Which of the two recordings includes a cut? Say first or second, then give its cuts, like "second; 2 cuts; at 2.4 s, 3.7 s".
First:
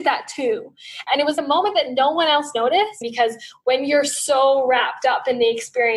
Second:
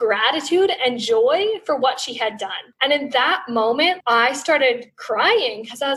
first; 2 cuts; at 1.0 s, 3.0 s